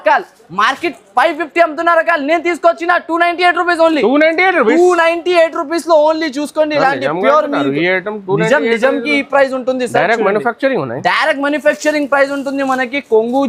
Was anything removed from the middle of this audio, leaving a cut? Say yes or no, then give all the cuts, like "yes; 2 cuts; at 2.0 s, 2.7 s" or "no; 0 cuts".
no; 0 cuts